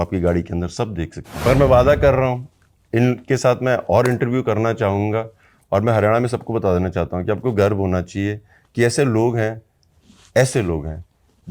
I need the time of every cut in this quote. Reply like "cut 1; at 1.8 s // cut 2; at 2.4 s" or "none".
cut 1; at 1.4 s